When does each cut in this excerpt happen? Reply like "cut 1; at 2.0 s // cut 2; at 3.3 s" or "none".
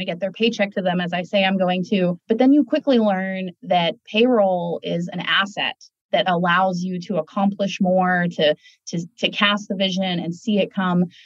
cut 1; at 2.2 s